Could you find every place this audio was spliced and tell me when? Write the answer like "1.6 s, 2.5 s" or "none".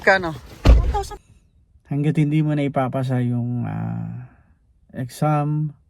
1.1 s